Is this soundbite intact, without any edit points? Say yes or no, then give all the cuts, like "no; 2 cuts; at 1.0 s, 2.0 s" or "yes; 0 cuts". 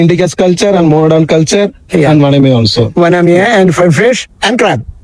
yes; 0 cuts